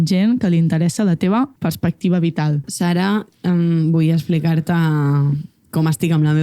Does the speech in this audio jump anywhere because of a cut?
yes; 2 cuts; at 1.5 s, 2.7 s

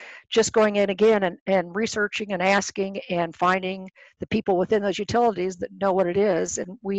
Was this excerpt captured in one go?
yes; 0 cuts

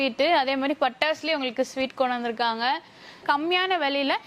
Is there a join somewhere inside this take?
yes; 1 cut; at 3.2 s

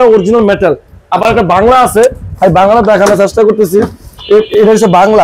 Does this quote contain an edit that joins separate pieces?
no; 0 cuts

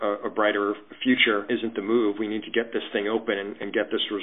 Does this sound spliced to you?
yes; 1 cut; at 1.4 s

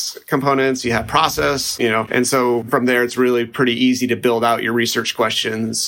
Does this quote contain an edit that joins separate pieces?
yes; 1 cut; at 2.7 s

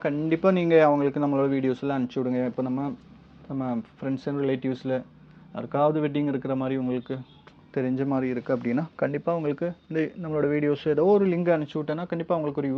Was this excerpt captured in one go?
yes; 0 cuts

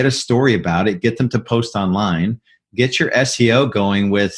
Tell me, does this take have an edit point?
no; 0 cuts

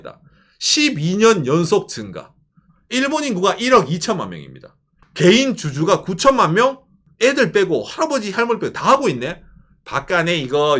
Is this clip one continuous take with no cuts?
no; 2 cuts; at 4.9 s, 7.0 s

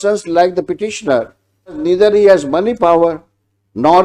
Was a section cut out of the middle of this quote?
yes; 1 cut; at 1.8 s

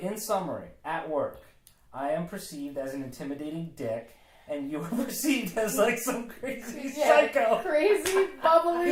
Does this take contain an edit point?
no; 0 cuts

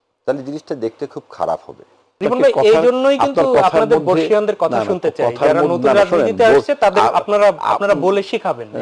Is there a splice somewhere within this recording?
yes; 1 cut; at 2.2 s

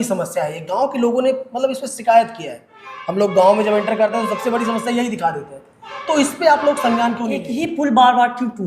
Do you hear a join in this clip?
yes; 1 cut; at 7.5 s

